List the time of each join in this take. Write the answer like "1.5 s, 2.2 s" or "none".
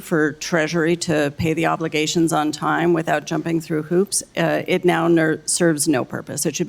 3.0 s